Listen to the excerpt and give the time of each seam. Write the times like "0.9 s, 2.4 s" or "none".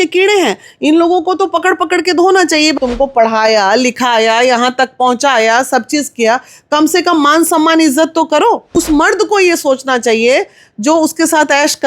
2.7 s, 8.7 s

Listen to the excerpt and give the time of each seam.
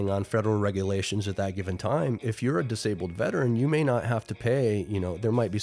none

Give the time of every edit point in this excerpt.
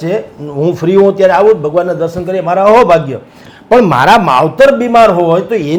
none

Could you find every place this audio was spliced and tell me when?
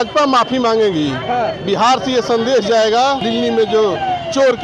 3.2 s

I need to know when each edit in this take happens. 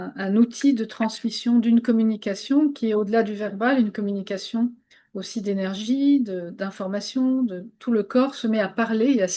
none

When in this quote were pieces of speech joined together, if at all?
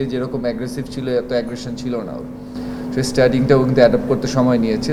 none

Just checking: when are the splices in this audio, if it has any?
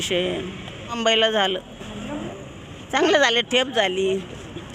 1.0 s, 2.3 s

